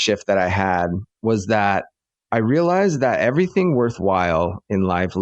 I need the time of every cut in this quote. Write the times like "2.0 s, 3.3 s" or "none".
1.1 s